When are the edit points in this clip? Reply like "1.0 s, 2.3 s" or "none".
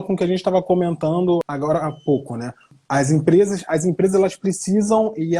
1.5 s, 2.7 s